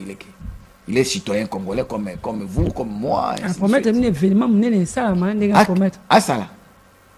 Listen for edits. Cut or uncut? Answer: uncut